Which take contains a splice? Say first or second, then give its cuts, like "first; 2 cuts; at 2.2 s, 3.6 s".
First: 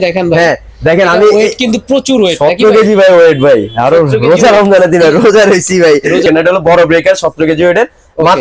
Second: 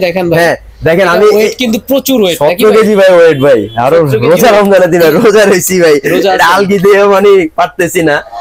first; 1 cut; at 6.2 s